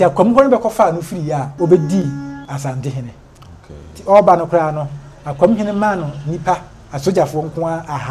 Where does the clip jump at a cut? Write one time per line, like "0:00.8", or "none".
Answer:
0:01.5
0:02.4